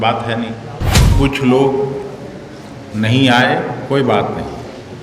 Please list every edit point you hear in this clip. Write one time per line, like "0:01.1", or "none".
0:01.0